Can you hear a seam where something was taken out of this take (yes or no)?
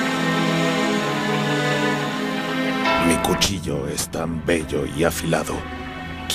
no